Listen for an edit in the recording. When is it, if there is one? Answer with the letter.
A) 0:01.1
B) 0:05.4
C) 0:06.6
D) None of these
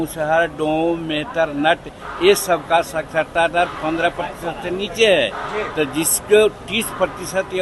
D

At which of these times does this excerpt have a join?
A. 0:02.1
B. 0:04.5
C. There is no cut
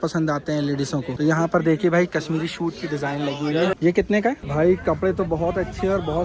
B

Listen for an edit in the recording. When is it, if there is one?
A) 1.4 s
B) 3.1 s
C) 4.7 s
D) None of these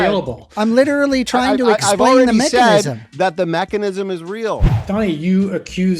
C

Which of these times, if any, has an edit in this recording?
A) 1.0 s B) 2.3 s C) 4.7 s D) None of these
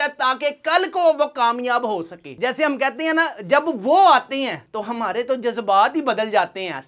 B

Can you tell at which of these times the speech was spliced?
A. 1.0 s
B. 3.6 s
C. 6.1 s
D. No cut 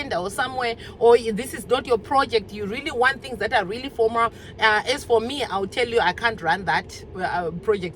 D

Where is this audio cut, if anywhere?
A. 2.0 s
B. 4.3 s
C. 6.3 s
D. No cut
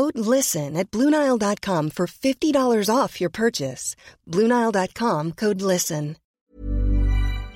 C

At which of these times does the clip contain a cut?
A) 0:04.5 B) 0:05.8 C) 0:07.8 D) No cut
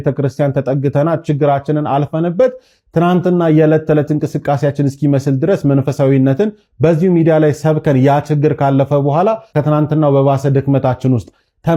D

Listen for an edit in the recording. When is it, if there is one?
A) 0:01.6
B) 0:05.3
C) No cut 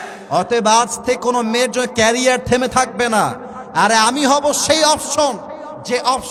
C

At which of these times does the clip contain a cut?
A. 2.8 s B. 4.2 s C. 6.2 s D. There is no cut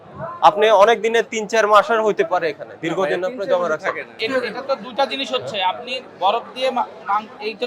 B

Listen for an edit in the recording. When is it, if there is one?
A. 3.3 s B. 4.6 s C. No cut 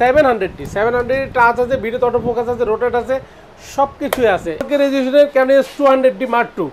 B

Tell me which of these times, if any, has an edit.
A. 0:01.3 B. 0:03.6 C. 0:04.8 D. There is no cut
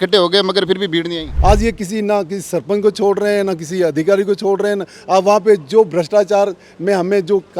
A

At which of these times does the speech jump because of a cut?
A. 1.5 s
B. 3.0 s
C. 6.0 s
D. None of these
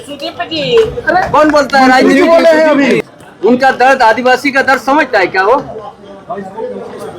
B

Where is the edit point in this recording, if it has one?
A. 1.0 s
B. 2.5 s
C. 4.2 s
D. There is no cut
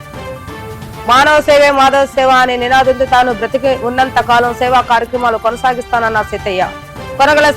A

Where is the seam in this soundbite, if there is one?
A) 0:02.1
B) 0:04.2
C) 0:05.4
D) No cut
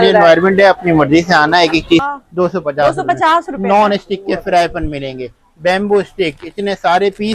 A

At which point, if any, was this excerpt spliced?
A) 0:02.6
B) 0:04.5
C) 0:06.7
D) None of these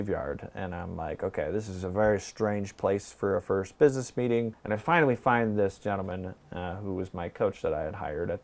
B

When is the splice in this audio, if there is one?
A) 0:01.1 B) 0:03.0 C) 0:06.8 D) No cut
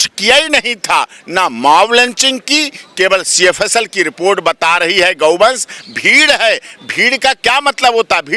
D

